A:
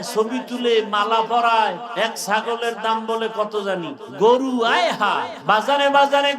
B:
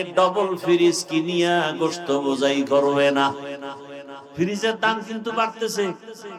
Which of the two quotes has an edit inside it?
A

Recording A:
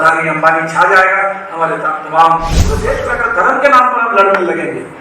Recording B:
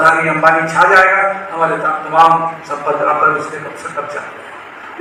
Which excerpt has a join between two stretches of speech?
A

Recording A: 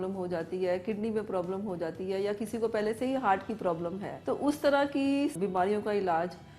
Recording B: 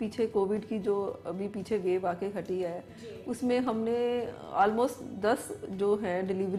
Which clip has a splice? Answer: A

